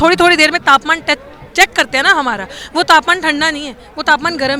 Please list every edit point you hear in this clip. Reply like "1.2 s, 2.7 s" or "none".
none